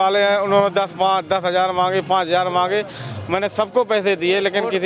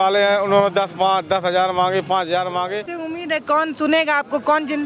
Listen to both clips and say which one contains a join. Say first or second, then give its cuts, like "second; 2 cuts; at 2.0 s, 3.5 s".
second; 1 cut; at 2.9 s